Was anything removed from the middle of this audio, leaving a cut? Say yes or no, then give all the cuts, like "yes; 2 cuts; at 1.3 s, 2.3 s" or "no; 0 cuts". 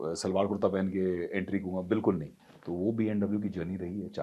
yes; 1 cut; at 2.4 s